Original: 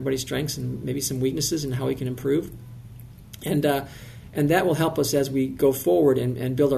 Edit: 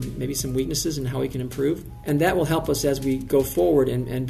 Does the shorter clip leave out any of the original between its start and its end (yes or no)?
yes